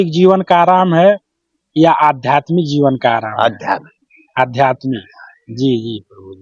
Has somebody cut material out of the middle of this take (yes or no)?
no